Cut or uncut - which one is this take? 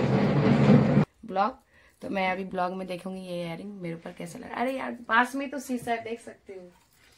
cut